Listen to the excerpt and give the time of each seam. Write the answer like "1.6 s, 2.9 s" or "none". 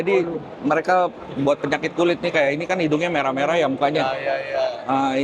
none

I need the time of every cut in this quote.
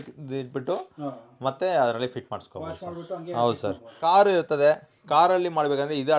4.0 s

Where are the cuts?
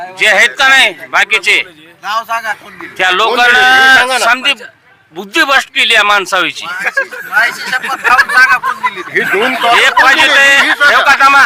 none

